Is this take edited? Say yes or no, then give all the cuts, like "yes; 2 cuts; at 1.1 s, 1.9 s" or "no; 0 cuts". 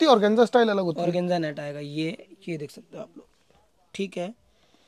no; 0 cuts